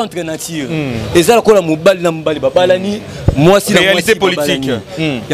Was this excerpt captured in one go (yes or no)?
yes